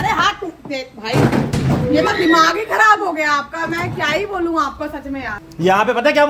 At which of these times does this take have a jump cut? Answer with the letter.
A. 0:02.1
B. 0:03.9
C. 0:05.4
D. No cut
C